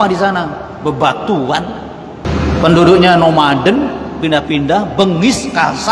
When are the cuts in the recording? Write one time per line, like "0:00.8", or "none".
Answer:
0:02.3